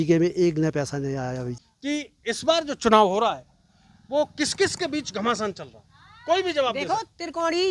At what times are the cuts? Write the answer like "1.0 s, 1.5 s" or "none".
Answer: 1.7 s